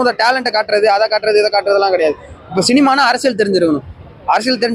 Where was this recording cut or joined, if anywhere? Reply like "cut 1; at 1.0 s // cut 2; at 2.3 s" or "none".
none